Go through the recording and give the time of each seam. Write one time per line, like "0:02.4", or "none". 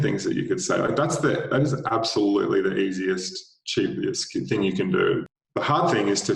0:05.4